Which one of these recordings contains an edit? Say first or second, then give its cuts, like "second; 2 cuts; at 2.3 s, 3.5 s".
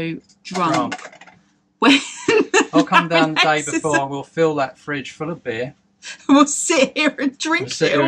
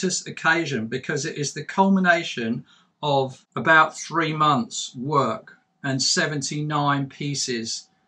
second; 1 cut; at 3.4 s